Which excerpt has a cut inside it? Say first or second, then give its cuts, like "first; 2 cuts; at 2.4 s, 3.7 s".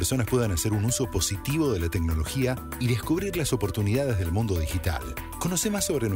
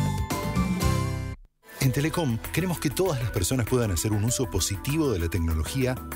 second; 1 cut; at 1.4 s